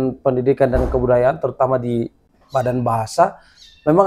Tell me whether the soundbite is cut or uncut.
uncut